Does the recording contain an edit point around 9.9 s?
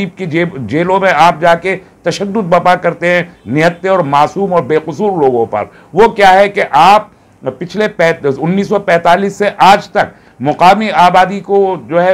no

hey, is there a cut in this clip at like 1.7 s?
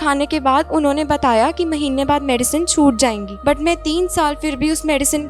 no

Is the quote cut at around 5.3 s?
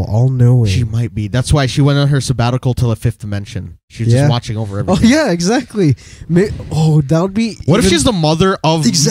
no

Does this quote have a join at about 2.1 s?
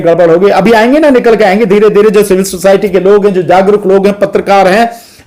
no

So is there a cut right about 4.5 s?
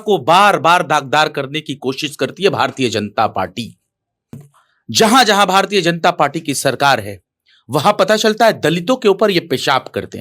yes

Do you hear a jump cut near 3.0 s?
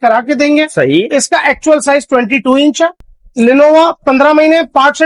yes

